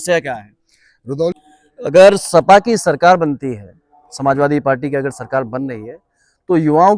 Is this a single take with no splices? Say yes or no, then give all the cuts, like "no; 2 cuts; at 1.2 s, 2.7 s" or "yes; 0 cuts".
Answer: no; 1 cut; at 1.3 s